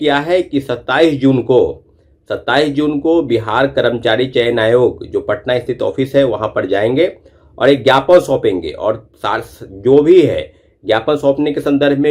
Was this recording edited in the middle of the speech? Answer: no; 0 cuts

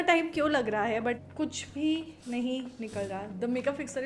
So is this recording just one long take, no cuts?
no; 1 cut; at 1.2 s

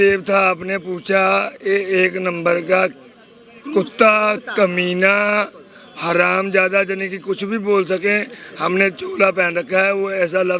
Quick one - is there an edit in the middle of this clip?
no; 0 cuts

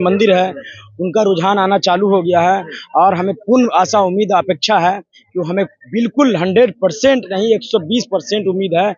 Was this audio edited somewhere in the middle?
no; 0 cuts

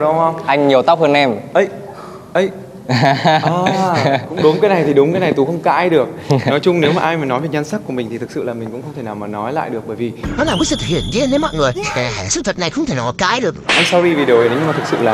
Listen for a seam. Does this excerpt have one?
no; 0 cuts

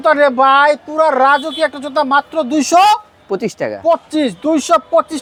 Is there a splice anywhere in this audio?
no; 0 cuts

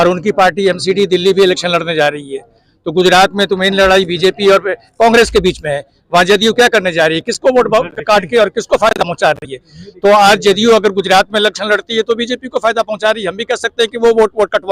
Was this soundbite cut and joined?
no; 0 cuts

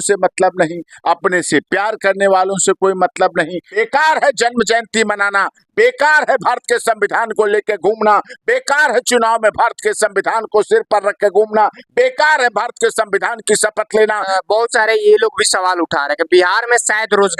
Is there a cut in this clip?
yes; 2 cuts; at 3.6 s, 14.3 s

